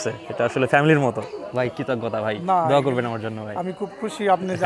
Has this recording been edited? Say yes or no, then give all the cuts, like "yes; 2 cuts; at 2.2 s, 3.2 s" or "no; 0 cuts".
no; 0 cuts